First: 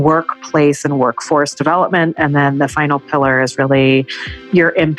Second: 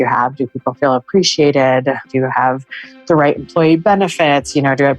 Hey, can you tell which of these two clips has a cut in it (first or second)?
second